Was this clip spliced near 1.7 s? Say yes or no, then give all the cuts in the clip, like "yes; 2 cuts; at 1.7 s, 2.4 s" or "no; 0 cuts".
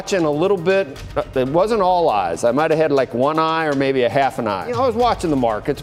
no; 1 cut; at 4.7 s